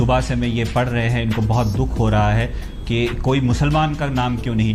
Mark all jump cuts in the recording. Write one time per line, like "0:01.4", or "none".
none